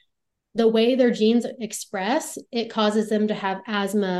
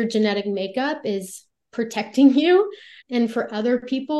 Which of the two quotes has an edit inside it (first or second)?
second